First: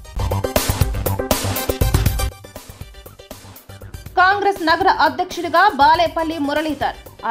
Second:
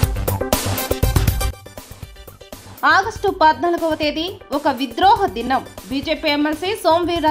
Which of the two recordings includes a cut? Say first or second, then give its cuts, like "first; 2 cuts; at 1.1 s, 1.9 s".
second; 1 cut; at 2.6 s